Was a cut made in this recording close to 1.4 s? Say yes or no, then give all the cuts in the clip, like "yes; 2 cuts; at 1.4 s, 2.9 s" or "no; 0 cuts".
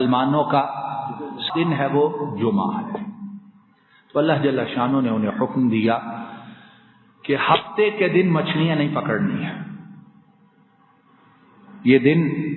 yes; 1 cut; at 1.4 s